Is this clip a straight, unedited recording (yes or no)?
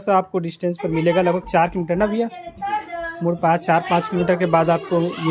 yes